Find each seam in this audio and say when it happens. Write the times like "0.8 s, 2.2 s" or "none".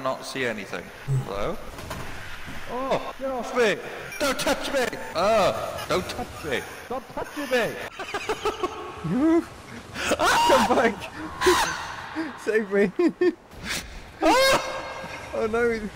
1.8 s, 3.1 s, 7.9 s